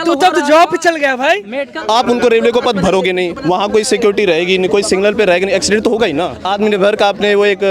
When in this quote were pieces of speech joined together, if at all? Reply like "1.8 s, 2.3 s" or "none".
1.7 s, 6.4 s